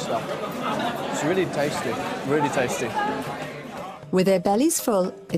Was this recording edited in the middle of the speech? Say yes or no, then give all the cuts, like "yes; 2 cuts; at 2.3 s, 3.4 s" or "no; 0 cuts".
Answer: no; 0 cuts